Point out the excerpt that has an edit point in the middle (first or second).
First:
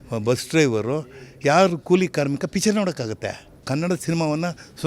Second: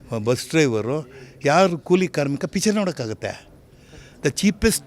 first